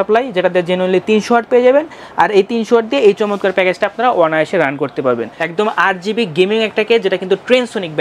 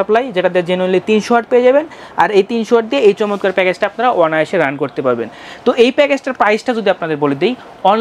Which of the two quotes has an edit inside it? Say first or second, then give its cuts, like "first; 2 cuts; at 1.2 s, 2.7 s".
first; 1 cut; at 5.4 s